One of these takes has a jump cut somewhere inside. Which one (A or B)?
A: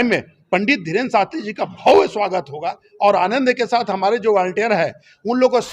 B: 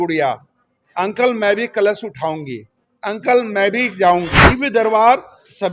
B